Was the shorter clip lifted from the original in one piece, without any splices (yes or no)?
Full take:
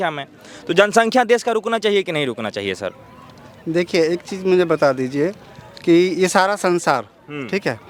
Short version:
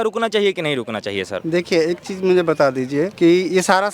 no